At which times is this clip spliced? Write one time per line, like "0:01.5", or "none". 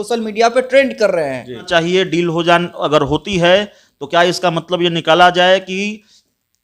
0:01.7